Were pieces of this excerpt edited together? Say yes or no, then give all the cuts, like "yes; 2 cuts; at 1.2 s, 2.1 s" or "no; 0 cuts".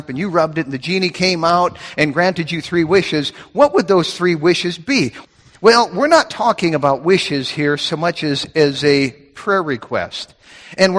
yes; 1 cut; at 5.2 s